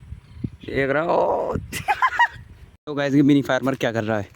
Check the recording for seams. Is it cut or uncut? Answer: cut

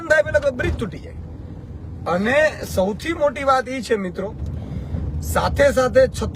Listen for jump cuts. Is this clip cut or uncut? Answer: cut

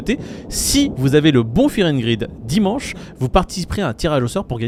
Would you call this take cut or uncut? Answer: uncut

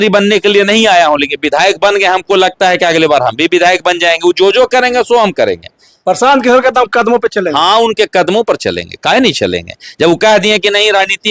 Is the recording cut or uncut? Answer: uncut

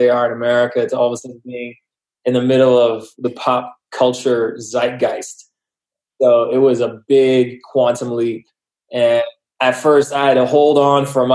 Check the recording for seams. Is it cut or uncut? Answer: cut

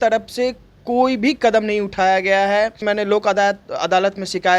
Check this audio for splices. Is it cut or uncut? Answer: cut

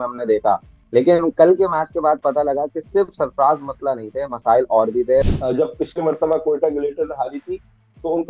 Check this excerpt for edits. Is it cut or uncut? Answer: cut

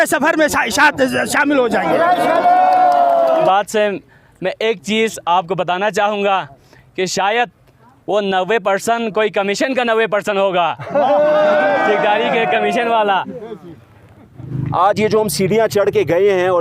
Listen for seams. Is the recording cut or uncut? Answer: cut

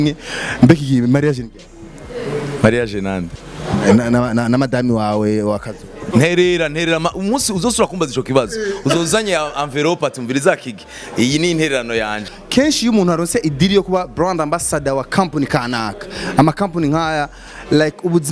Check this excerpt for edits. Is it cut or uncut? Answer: cut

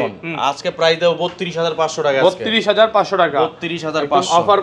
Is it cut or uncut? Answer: uncut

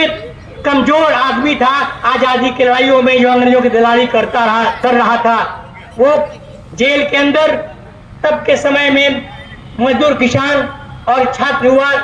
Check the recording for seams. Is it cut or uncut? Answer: uncut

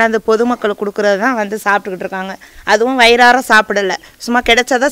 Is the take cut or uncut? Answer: uncut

